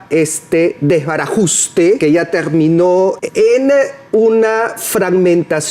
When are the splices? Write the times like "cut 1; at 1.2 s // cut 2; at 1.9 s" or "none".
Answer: cut 1; at 2.0 s // cut 2; at 3.2 s